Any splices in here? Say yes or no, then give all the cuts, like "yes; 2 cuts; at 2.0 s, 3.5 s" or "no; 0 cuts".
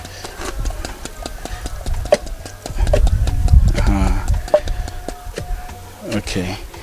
yes; 1 cut; at 2.0 s